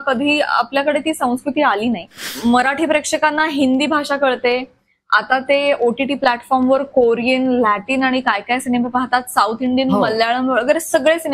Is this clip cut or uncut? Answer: cut